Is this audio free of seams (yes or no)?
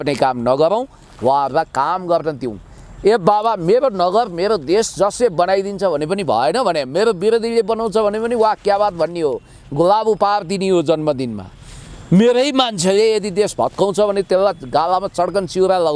yes